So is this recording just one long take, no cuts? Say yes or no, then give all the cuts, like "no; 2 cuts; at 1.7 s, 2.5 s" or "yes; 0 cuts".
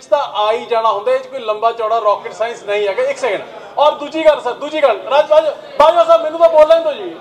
yes; 0 cuts